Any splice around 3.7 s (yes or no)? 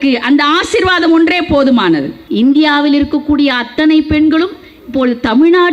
no